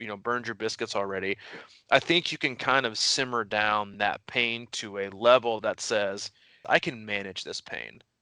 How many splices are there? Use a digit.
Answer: 1